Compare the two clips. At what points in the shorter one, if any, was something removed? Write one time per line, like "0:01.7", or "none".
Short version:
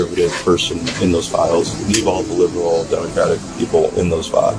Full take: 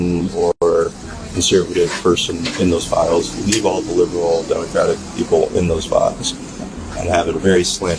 none